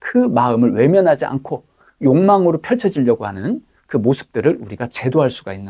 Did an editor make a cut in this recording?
no; 0 cuts

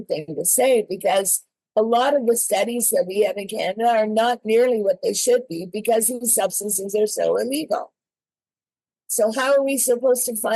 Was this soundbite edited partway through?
no; 0 cuts

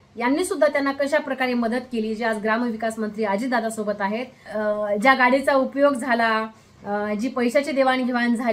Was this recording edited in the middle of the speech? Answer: yes; 1 cut; at 4.4 s

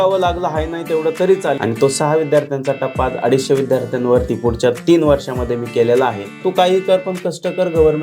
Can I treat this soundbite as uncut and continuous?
no; 2 cuts; at 1.6 s, 6.4 s

